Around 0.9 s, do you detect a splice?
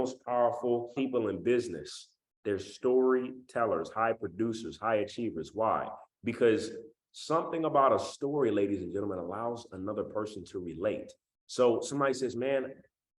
yes; 1 cut; at 0.9 s

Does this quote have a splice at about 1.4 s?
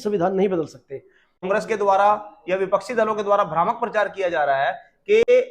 yes; 1 cut; at 1.4 s

